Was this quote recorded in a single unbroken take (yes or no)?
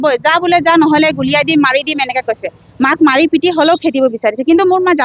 yes